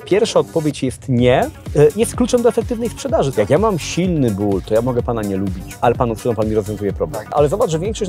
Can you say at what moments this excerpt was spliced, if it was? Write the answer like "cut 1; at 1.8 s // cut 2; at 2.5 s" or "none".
cut 1; at 1.6 s // cut 2; at 3.3 s // cut 3; at 5.7 s // cut 4; at 7.3 s

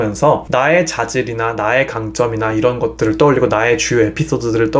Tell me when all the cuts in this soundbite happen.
none

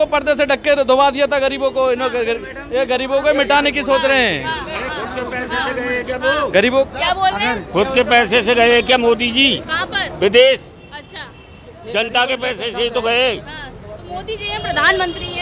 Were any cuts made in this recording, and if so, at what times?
none

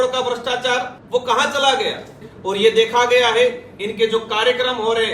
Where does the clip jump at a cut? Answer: cut 1; at 1.0 s // cut 2; at 2.3 s

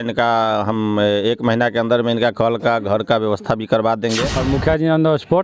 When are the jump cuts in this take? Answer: cut 1; at 4.3 s

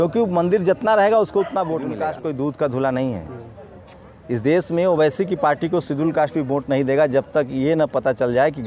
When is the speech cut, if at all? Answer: cut 1; at 2.1 s

